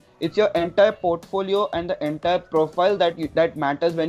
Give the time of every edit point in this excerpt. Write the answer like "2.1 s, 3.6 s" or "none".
none